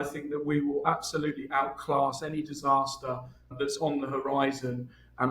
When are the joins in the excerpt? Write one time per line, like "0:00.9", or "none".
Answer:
0:03.6